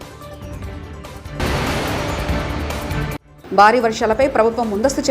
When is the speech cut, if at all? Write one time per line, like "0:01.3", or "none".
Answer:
0:01.4
0:03.3